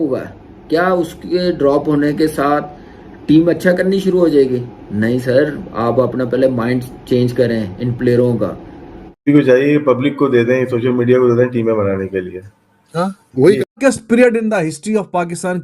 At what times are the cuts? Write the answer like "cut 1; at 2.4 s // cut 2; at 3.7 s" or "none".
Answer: cut 1; at 9.2 s // cut 2; at 13.8 s